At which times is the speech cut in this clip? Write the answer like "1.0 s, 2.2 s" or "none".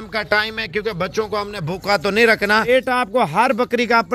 2.7 s